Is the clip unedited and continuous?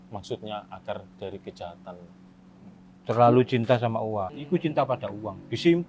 no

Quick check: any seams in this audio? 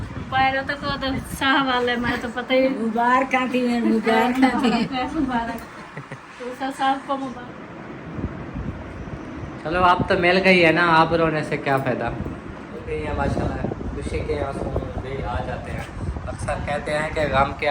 yes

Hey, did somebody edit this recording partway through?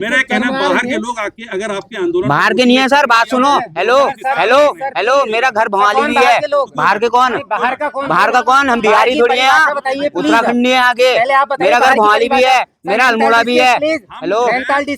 no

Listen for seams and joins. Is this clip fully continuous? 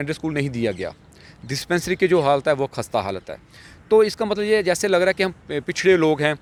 yes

